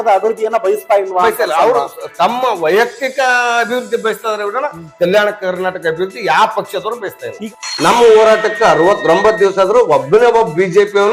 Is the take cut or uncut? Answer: cut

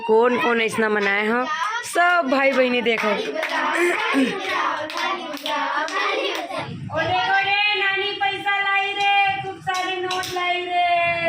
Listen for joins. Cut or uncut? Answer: cut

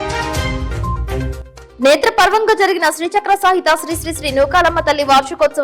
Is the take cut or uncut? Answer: cut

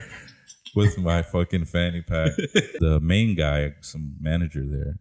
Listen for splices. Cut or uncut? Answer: cut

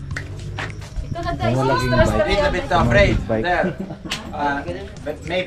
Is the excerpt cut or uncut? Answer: uncut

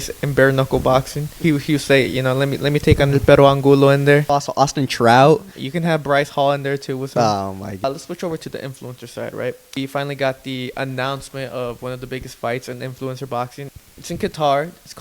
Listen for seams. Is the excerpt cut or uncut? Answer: cut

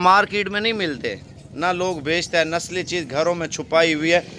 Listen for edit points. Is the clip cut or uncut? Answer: uncut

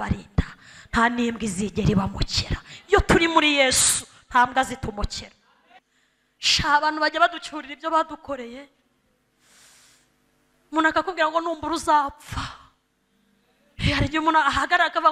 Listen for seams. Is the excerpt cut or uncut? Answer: cut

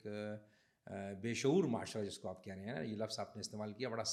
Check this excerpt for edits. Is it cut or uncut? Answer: uncut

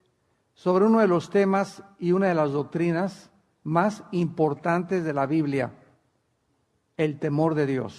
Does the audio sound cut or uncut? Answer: cut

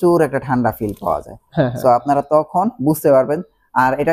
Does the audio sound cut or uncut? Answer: uncut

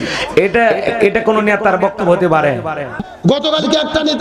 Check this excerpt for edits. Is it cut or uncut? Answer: uncut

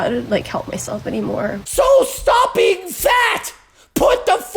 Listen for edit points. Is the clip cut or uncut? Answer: cut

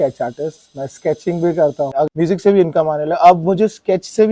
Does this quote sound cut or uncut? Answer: cut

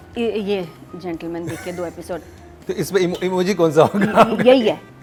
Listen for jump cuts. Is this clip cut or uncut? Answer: uncut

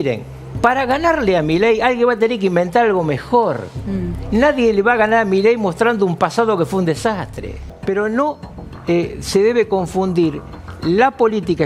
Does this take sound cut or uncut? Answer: cut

